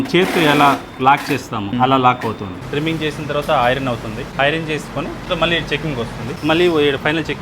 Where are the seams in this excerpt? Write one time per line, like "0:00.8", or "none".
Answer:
0:01.7
0:02.6
0:04.2
0:05.3
0:06.4